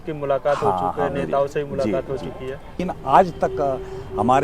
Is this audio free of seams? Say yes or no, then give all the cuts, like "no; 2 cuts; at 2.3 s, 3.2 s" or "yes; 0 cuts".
no; 1 cut; at 2.8 s